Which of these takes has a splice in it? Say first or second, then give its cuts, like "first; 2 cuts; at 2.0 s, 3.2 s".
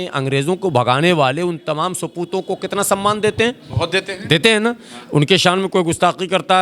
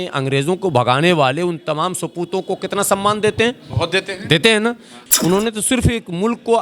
second; 1 cut; at 4.9 s